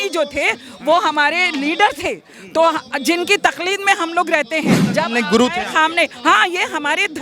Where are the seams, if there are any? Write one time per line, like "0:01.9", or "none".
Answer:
0:04.8